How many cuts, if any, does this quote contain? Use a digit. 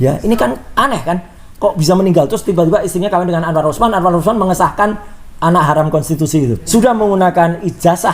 1